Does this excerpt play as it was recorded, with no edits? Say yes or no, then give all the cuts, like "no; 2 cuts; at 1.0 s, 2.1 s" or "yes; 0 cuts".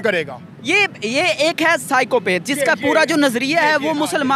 yes; 0 cuts